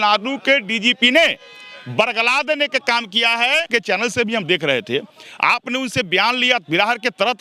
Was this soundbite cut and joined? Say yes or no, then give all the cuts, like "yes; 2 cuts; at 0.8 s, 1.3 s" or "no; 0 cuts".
yes; 1 cut; at 3.7 s